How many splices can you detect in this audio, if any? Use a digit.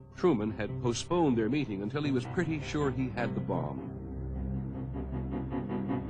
1